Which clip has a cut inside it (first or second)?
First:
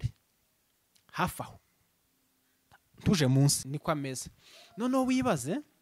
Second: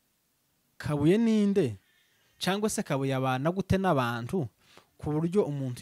first